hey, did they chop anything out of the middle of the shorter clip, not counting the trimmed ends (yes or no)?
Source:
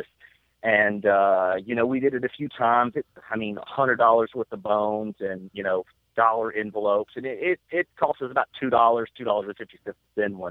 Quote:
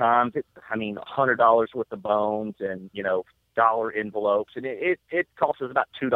no